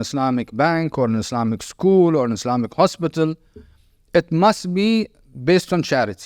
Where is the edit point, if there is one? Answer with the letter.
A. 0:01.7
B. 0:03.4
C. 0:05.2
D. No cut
D